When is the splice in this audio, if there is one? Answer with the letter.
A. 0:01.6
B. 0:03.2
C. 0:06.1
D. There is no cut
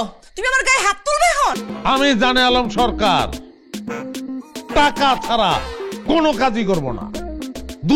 A